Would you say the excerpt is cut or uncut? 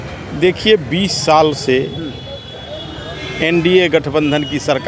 uncut